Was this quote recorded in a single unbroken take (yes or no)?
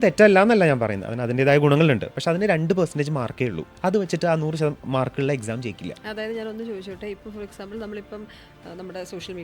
yes